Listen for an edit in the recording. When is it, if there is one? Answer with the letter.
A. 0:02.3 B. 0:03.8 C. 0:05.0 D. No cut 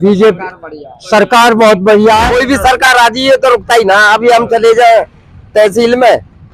A